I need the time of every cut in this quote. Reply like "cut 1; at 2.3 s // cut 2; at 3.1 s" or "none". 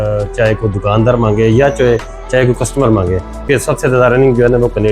cut 1; at 3.5 s